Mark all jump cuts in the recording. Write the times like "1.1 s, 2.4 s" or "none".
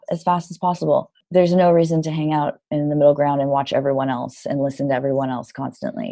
1.2 s